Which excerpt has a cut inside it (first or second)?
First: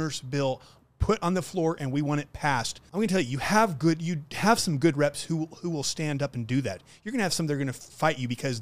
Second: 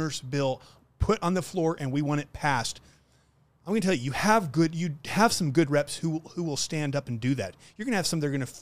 first